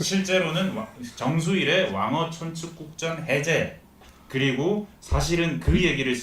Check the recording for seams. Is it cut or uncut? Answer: cut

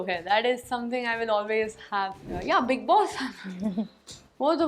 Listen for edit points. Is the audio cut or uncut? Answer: cut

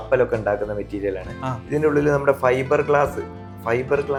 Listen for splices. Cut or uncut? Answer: uncut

